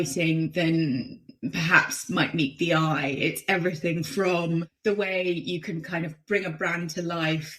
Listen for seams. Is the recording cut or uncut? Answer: cut